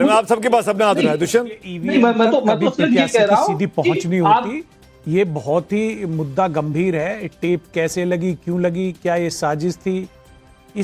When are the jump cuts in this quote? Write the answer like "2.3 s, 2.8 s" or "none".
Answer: none